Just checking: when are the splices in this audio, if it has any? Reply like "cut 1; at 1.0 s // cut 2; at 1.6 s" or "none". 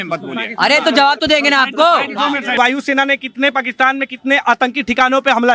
cut 1; at 2.6 s